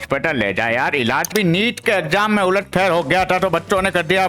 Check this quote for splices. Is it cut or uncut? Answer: cut